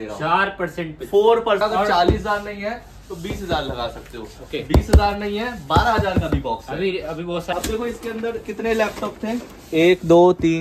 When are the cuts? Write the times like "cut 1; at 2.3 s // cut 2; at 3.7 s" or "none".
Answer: cut 1; at 1.6 s // cut 2; at 7.5 s